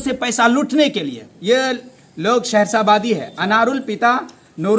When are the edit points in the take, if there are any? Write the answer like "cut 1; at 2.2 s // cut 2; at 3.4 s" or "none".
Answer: none